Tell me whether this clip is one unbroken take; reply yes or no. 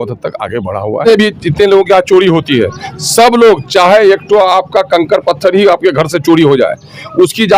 no